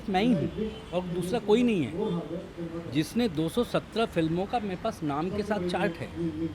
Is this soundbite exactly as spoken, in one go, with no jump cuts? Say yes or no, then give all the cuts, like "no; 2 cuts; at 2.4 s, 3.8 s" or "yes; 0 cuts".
yes; 0 cuts